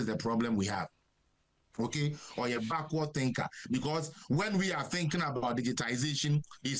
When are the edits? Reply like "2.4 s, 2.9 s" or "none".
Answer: none